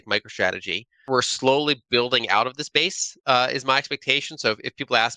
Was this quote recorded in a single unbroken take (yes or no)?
no